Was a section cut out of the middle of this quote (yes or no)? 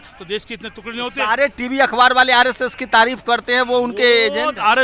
no